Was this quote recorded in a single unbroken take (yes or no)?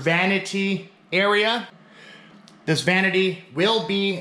no